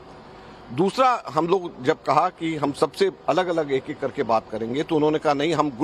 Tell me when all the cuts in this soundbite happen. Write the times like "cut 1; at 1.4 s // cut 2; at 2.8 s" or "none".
cut 1; at 4.9 s